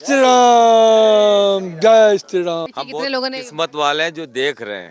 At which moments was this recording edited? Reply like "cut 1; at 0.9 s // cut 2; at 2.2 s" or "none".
cut 1; at 2.7 s